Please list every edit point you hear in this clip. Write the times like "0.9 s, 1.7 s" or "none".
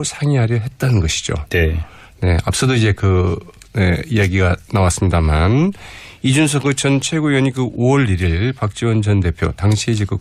none